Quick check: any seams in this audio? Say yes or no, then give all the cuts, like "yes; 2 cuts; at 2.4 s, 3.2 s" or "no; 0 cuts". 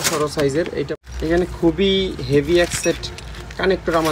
yes; 1 cut; at 0.9 s